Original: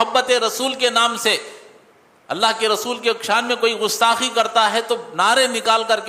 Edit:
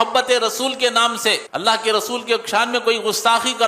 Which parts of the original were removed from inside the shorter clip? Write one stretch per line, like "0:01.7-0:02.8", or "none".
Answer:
0:01.5-0:02.2